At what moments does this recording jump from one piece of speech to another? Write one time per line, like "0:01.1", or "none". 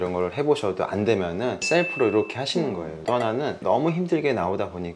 0:03.0